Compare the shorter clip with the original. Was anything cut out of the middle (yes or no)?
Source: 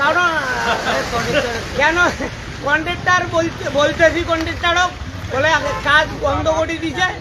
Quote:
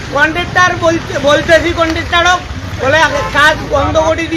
no